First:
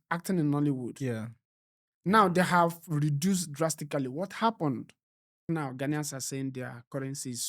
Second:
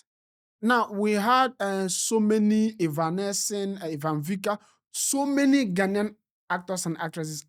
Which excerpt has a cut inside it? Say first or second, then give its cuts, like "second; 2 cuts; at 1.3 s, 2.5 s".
first; 1 cut; at 5.4 s